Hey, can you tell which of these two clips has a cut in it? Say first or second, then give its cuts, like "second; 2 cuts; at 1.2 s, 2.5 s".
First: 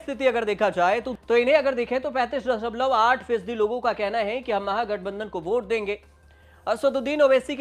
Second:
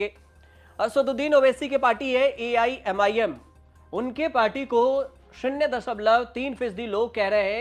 first; 1 cut; at 1.1 s